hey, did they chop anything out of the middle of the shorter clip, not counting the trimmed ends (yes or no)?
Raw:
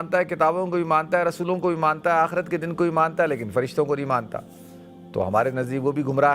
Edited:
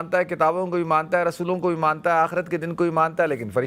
no